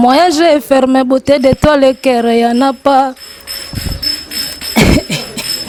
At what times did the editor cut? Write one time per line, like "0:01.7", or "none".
none

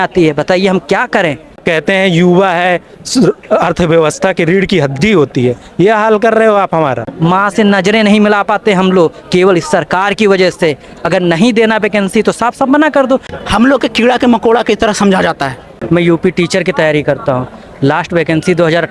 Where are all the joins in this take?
0:01.6
0:07.1
0:13.3
0:15.8

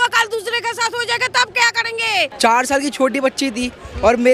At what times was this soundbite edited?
0:02.3

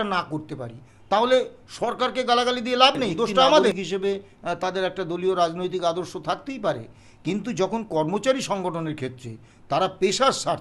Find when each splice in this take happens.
0:03.8

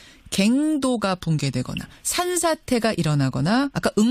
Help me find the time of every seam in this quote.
none

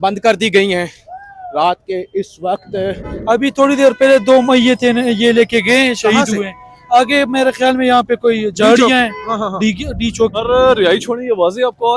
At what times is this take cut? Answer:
0:03.1
0:10.4

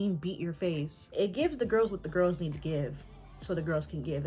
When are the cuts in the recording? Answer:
0:01.1

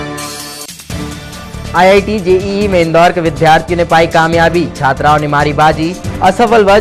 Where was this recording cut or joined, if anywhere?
0:01.1

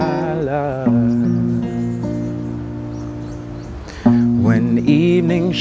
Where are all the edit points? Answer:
none

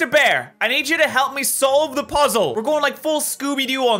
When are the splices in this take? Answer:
0:02.5

